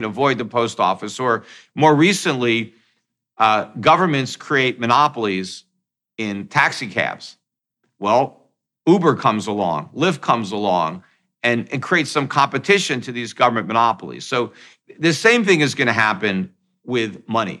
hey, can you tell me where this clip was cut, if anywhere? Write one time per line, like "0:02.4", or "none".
none